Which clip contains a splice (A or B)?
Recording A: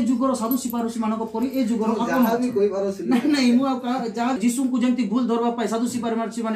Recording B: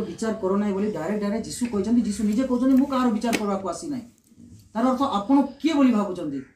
A